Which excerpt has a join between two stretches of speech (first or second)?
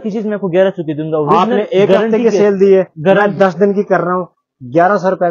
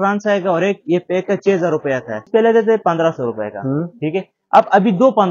second